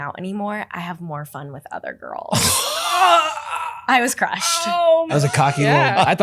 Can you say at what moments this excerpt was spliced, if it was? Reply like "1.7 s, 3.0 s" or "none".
5.1 s